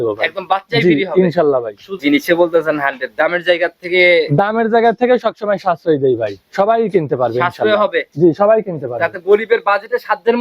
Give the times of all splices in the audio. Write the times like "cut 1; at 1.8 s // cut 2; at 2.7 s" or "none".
cut 1; at 2.0 s